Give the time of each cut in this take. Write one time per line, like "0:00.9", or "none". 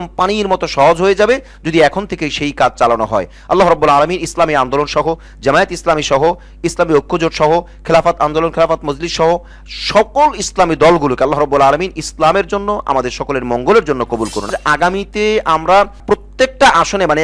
0:14.4